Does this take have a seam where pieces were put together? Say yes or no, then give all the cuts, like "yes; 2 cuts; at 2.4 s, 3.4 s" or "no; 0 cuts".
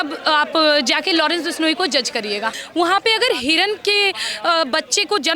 yes; 1 cut; at 2.6 s